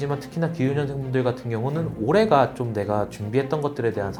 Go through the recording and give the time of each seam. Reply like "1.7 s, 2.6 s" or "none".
none